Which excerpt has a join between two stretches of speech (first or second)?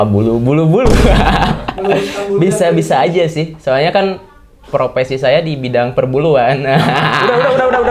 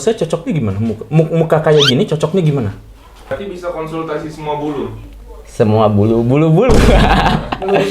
second